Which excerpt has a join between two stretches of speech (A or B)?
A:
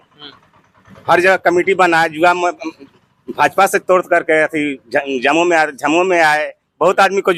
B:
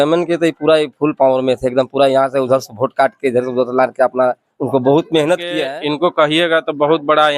B